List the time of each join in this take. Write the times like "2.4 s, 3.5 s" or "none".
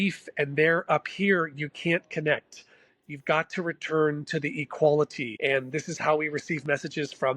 5.2 s